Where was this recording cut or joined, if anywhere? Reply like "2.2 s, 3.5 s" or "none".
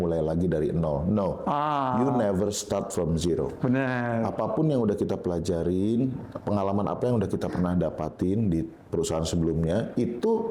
none